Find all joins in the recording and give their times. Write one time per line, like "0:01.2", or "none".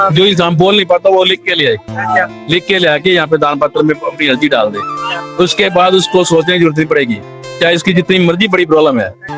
none